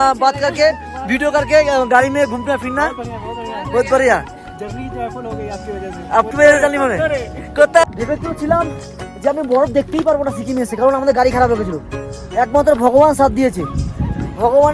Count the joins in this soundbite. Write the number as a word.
one